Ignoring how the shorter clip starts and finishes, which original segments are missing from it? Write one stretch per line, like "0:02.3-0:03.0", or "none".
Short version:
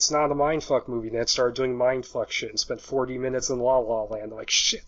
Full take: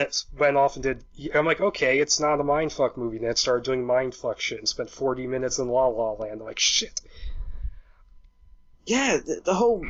none